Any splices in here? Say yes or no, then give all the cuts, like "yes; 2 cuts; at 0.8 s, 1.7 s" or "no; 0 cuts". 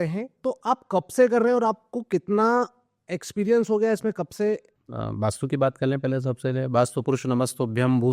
no; 0 cuts